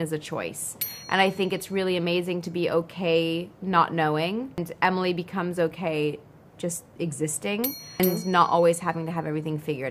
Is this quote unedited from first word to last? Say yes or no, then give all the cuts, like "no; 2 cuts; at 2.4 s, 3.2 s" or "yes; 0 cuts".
no; 2 cuts; at 4.7 s, 8.0 s